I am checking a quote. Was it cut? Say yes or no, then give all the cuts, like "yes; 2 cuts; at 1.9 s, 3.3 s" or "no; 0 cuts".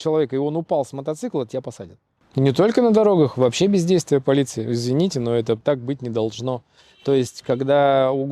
yes; 2 cuts; at 2.2 s, 5.6 s